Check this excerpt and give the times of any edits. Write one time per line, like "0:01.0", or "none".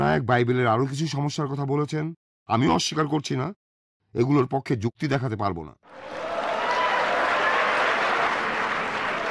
0:06.1
0:08.3